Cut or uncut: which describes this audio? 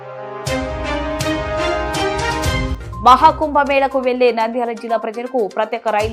cut